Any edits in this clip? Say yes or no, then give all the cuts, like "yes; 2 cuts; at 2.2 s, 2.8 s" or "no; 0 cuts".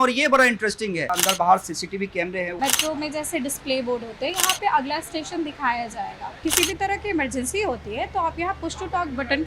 yes; 3 cuts; at 1.1 s, 2.6 s, 6.4 s